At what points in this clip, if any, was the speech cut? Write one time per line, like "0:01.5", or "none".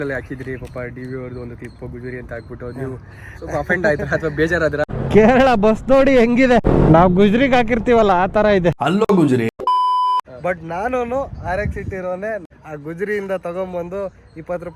0:04.8
0:06.7
0:10.3
0:12.4